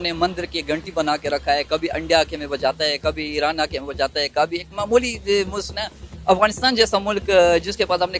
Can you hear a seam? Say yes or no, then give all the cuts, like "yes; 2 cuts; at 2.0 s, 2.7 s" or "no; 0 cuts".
no; 0 cuts